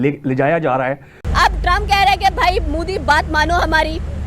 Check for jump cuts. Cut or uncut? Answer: uncut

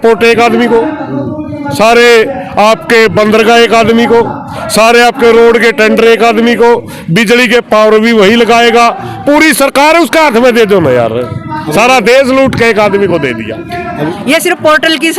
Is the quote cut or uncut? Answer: cut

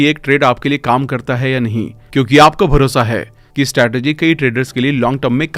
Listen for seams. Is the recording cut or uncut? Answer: uncut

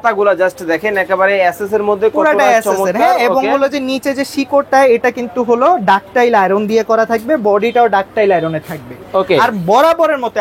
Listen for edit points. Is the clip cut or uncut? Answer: uncut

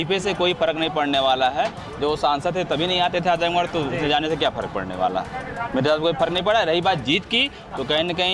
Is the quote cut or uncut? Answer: uncut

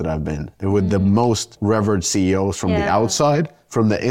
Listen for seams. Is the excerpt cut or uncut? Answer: cut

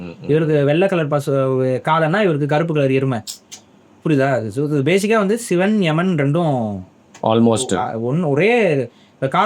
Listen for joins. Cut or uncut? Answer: uncut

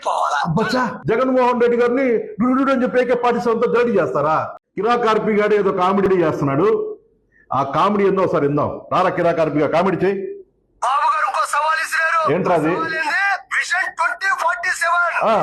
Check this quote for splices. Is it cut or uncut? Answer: cut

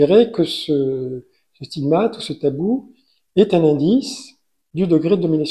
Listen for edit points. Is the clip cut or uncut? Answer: uncut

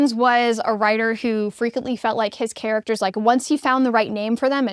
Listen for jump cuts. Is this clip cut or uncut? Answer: uncut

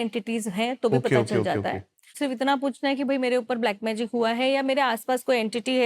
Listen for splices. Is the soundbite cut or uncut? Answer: cut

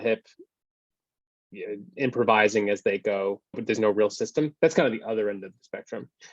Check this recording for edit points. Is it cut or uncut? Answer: cut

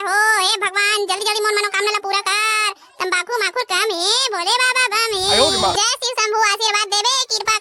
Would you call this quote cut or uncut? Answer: cut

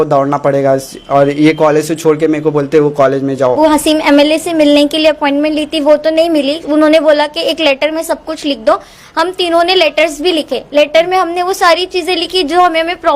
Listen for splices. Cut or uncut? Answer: cut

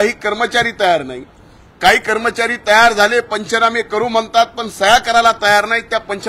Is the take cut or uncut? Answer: uncut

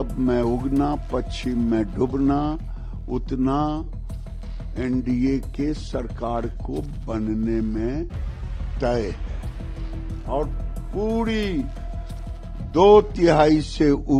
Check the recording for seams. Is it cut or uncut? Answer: uncut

